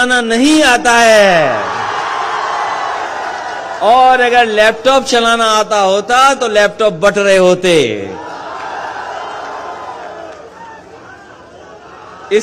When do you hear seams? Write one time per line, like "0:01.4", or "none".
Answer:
none